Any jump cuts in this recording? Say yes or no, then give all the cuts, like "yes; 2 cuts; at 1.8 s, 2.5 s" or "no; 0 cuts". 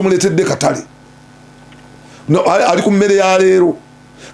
no; 0 cuts